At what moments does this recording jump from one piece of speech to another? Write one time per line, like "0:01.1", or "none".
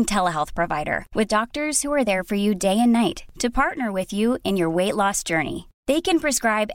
none